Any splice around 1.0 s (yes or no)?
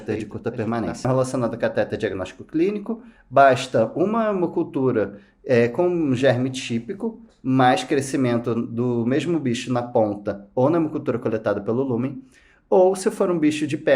yes